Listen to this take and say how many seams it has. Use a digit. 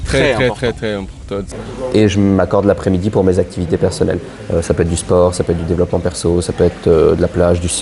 1